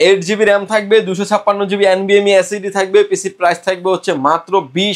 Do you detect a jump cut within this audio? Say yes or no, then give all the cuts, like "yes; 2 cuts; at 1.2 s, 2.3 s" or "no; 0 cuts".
no; 0 cuts